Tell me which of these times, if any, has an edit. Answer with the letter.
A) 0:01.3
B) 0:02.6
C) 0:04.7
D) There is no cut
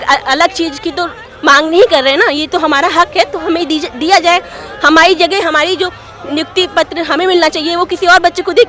D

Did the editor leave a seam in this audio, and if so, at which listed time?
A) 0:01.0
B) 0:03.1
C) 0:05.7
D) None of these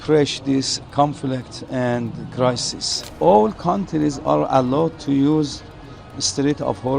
B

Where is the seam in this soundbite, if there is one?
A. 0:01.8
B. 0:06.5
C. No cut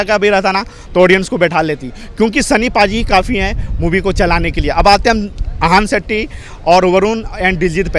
C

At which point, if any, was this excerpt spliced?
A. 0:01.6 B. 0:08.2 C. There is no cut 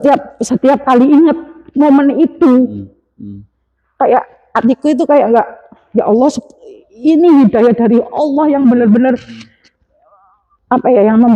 C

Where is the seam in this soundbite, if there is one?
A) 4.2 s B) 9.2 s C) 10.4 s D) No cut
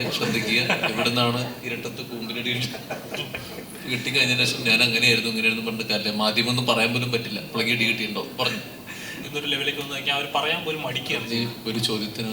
B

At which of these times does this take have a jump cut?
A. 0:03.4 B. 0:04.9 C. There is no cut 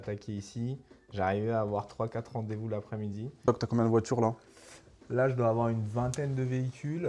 A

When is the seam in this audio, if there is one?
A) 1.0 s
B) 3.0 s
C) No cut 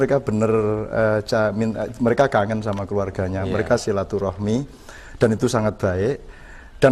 C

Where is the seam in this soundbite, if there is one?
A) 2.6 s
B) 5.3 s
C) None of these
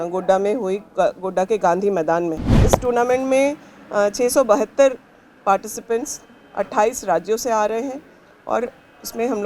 A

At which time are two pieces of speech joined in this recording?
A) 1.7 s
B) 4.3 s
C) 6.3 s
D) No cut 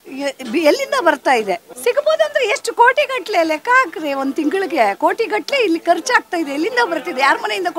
A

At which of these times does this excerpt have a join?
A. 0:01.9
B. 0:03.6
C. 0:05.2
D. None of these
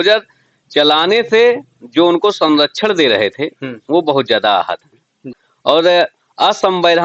C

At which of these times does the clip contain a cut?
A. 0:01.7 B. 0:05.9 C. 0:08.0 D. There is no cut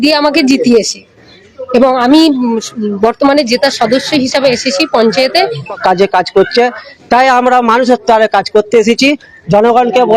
B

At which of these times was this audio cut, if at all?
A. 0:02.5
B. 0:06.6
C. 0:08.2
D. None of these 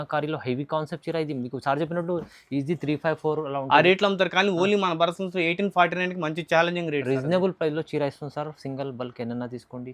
D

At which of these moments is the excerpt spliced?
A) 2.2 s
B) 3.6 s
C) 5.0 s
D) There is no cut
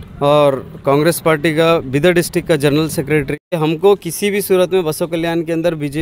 B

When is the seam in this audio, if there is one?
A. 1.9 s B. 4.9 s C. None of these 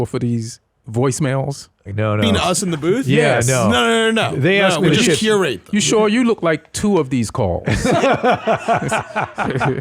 A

